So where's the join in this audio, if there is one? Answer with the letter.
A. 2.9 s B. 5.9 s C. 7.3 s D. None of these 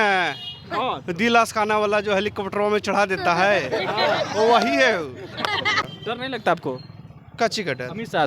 B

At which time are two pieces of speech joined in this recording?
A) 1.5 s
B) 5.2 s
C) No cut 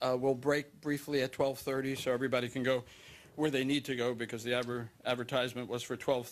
B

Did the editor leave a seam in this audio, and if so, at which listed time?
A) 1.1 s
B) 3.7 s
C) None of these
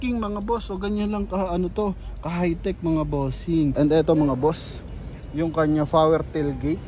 B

